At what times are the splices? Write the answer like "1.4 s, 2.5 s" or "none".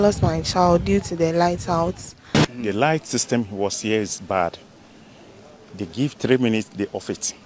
2.3 s

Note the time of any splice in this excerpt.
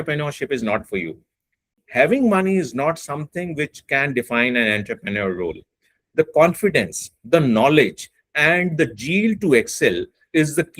1.8 s

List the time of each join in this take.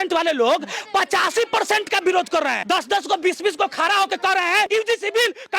2.6 s, 4.7 s

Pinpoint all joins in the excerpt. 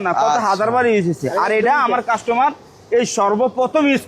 none

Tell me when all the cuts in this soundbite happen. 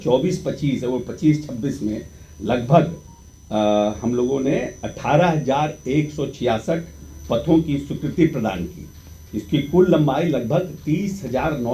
none

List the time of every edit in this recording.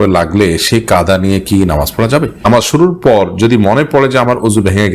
2.8 s

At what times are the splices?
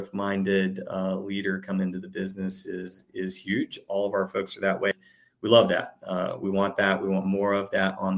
4.9 s

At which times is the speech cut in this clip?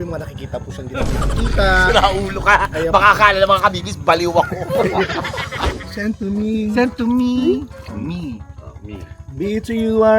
5.6 s

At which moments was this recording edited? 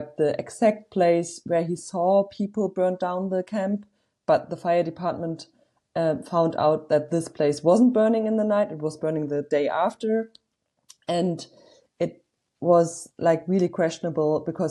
none

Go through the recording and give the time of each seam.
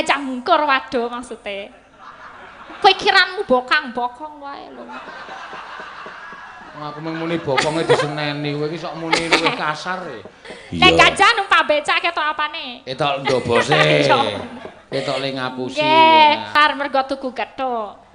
16.5 s

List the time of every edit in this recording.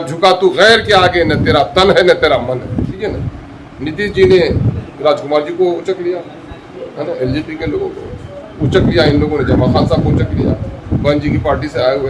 3.0 s

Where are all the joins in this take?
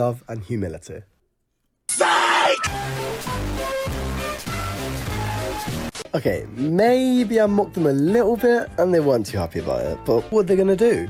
none

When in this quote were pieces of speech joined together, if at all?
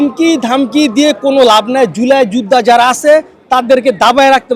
none

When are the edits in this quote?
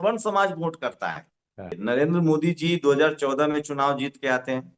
1.8 s

